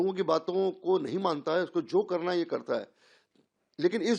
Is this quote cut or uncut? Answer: uncut